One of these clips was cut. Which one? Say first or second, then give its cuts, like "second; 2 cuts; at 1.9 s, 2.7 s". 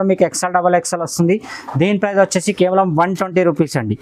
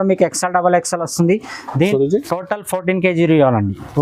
second; 1 cut; at 1.9 s